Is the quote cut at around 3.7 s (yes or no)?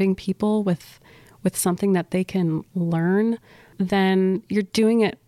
yes